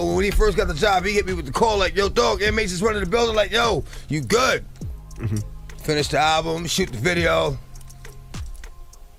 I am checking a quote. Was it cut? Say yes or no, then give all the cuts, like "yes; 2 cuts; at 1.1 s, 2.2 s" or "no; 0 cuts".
no; 0 cuts